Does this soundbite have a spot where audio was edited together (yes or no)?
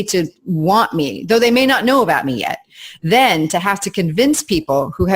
no